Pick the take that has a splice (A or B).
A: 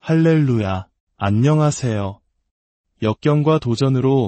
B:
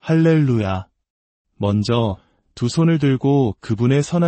B